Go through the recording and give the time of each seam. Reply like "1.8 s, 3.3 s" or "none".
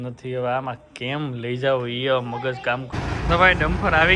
2.9 s